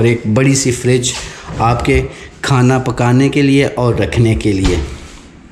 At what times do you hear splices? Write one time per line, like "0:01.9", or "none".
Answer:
none

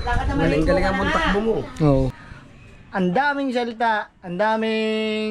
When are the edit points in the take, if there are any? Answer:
0:02.2

